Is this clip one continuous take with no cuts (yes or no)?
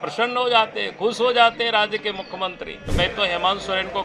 no